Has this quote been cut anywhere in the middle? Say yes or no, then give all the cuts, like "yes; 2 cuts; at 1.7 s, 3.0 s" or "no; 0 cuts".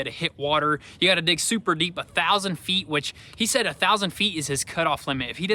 no; 0 cuts